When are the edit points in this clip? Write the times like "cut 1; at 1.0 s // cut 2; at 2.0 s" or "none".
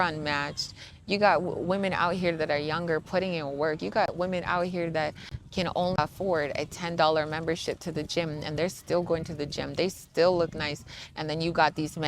cut 1; at 6.0 s